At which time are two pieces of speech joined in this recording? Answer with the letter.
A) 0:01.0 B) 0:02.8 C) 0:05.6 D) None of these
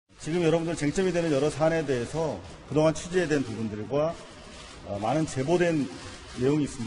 C